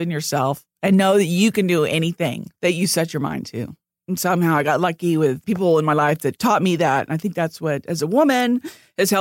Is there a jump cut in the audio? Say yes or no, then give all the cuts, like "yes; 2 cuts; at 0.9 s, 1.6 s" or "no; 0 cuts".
yes; 2 cuts; at 2.5 s, 5.4 s